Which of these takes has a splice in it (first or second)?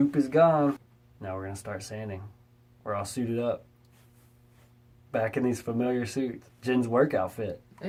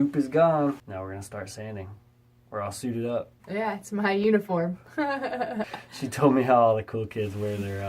second